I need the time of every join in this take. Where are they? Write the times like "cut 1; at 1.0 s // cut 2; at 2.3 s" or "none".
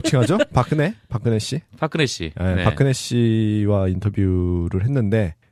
cut 1; at 3.0 s